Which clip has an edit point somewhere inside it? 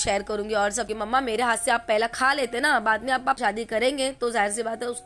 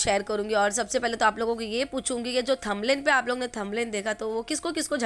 first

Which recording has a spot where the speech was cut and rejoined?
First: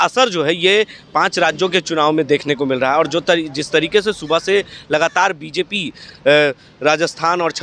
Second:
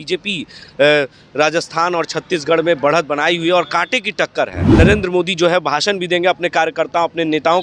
second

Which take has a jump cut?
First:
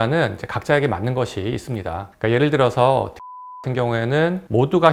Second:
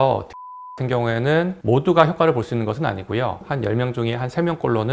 second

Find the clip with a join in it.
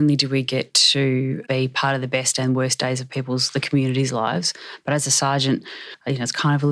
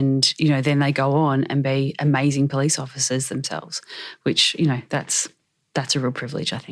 first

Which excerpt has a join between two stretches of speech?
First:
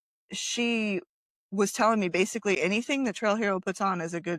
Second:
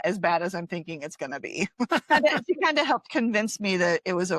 second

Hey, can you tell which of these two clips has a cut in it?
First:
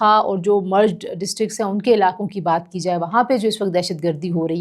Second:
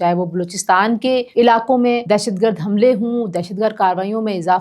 second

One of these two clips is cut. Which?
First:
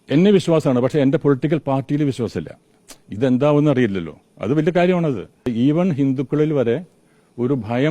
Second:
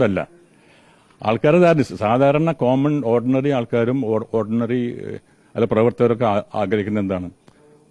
first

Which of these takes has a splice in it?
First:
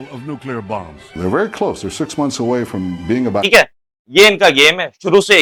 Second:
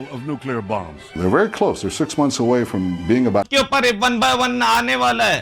second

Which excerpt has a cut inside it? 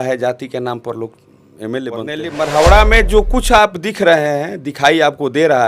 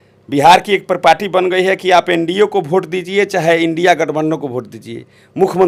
first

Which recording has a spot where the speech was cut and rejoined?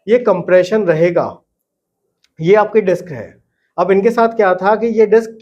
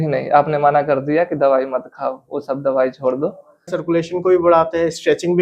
second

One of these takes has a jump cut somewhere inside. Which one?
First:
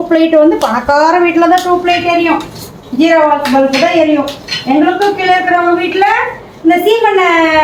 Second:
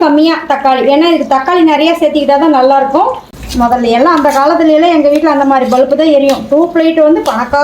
second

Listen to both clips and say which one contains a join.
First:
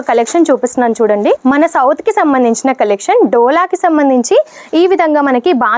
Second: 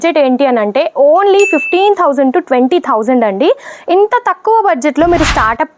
first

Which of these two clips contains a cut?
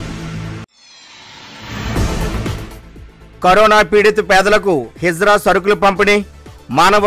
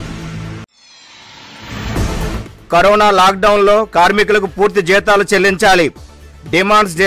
first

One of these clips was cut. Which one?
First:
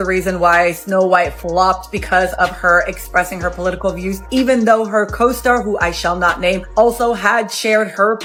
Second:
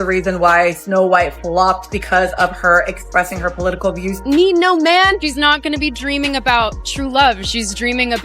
second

